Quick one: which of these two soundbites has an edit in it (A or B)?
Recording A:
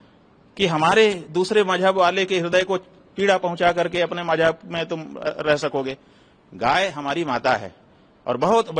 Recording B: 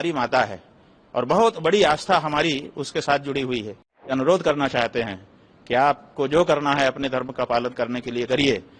B